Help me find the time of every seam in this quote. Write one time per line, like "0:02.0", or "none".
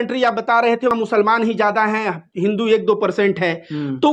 0:00.9